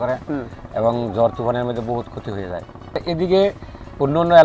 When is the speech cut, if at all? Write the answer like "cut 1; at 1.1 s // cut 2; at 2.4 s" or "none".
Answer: cut 1; at 3.0 s